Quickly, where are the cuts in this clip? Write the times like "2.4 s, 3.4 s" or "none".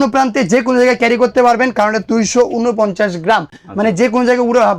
none